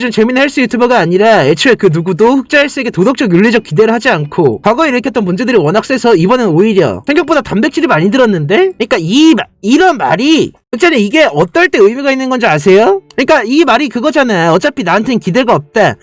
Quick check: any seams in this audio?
yes; 1 cut; at 13.1 s

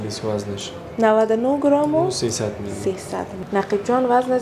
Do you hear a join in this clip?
yes; 1 cut; at 3.3 s

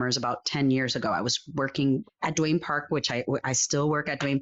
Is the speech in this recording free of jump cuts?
no; 1 cut; at 2.1 s

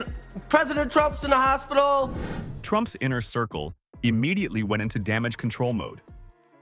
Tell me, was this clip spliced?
no; 0 cuts

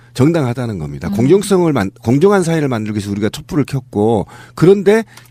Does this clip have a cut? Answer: no; 0 cuts

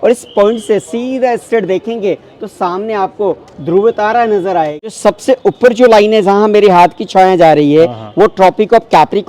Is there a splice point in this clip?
yes; 1 cut; at 5.0 s

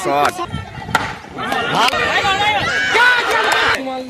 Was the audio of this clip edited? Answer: no; 0 cuts

